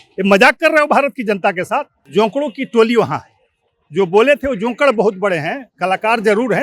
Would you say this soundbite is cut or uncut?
cut